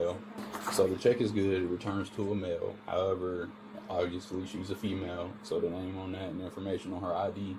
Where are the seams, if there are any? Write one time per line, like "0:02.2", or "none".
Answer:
none